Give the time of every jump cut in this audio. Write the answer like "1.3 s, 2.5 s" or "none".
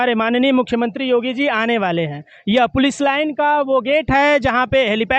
none